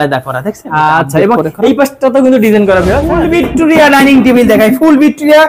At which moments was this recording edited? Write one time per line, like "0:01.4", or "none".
0:03.1